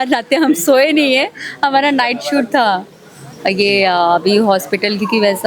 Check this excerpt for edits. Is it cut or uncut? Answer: uncut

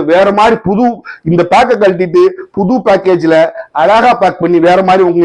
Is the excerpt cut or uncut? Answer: uncut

